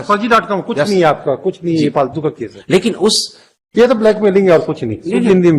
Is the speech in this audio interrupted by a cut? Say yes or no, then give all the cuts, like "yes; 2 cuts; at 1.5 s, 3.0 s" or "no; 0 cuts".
no; 0 cuts